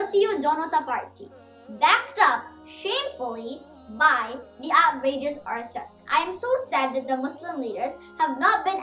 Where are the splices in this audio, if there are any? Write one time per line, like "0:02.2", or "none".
0:05.9